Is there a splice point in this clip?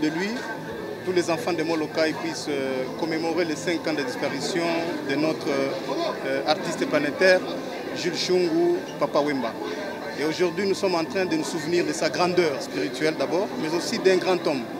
no; 0 cuts

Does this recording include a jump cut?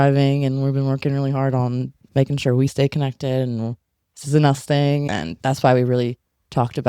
yes; 1 cut; at 5.1 s

